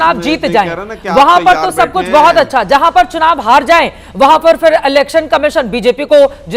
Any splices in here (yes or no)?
no